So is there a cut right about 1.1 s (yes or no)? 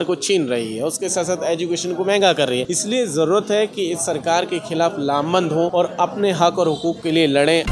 no